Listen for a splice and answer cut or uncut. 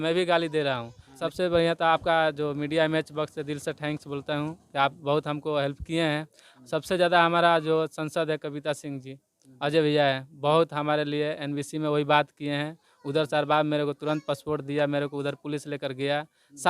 cut